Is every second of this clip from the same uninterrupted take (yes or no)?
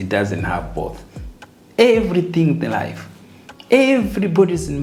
yes